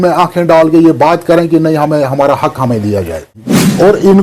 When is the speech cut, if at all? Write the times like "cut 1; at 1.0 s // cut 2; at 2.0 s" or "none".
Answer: cut 1; at 3.2 s